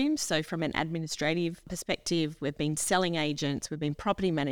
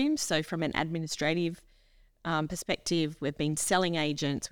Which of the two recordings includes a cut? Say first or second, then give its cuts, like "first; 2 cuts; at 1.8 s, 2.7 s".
first; 1 cut; at 1.8 s